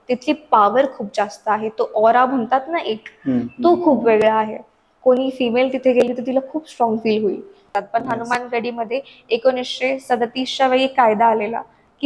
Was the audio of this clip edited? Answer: yes; 1 cut; at 7.7 s

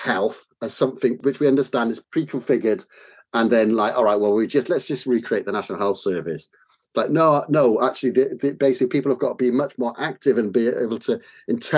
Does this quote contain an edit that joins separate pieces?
yes; 2 cuts; at 1.2 s, 2.0 s

